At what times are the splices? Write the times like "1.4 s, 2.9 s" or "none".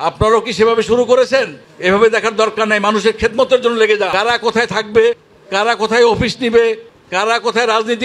4.1 s